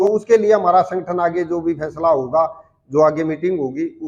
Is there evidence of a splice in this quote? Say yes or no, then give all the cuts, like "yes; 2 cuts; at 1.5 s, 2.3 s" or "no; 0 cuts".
no; 0 cuts